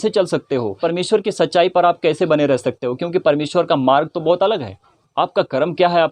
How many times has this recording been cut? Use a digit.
1